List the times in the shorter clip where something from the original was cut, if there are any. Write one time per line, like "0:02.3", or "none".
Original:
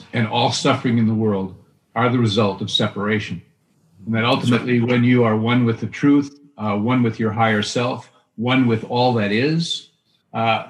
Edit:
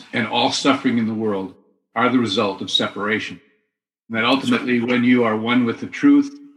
none

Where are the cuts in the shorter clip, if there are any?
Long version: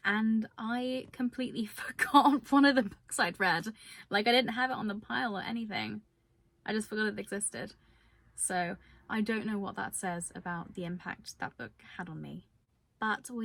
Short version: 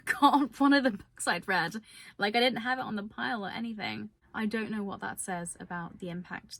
0:04.2

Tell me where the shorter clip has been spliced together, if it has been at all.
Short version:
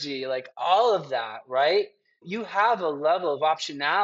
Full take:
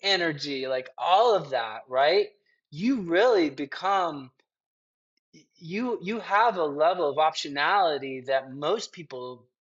0:02.3

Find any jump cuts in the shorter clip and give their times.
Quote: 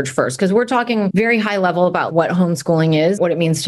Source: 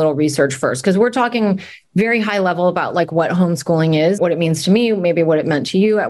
0:01.1
0:02.1

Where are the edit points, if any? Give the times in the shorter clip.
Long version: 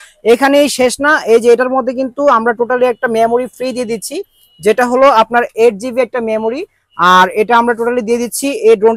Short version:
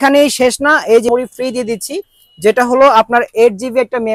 0:01.1

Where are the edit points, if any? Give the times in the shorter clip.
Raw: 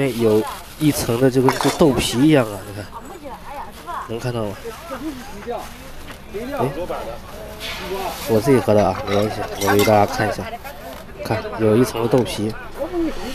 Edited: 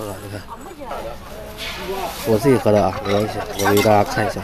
0:00.9

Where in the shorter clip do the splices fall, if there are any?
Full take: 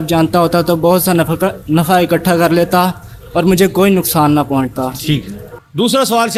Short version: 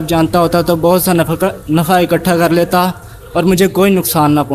none

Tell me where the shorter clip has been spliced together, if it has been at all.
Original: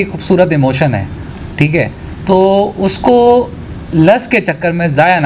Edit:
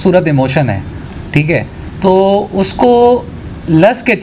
none

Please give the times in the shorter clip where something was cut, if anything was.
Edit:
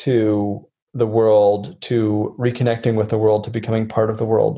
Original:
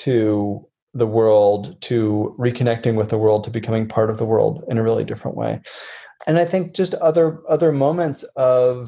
none

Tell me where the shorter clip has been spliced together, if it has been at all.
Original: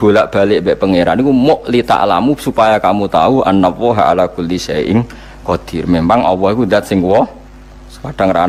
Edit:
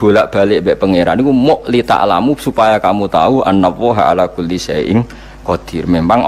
none

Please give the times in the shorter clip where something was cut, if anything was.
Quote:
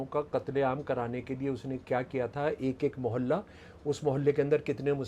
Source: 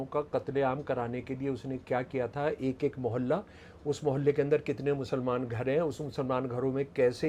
none

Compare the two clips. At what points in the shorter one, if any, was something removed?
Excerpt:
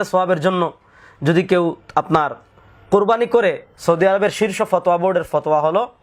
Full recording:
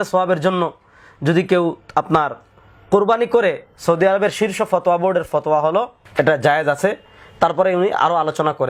none

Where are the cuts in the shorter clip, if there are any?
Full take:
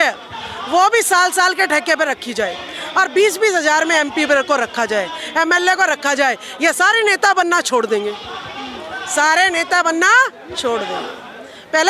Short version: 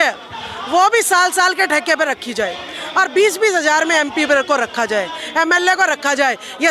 none

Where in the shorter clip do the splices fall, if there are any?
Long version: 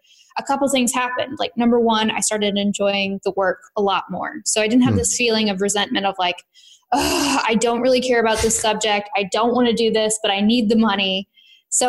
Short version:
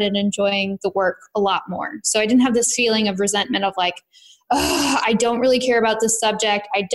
none

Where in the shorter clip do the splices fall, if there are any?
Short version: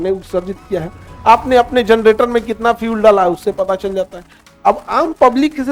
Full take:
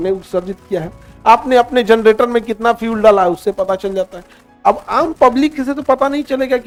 none

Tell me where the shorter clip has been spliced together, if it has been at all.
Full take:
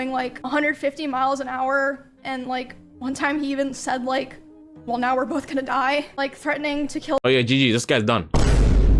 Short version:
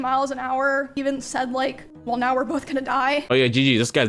0:01.0
0:01.9
0:03.3

